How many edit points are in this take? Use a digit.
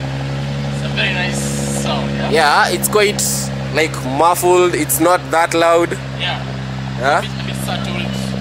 0